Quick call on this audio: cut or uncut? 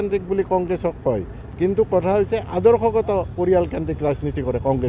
cut